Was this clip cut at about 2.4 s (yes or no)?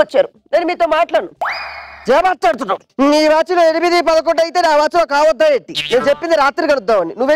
no